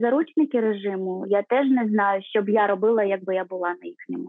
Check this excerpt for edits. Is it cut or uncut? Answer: cut